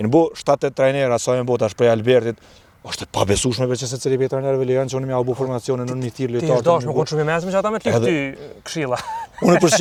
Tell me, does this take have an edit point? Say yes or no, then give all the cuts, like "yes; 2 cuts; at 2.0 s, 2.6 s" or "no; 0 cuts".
no; 0 cuts